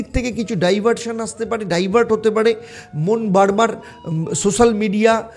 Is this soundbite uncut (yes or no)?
yes